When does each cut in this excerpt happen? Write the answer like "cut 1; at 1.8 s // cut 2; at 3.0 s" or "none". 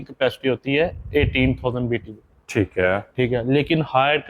none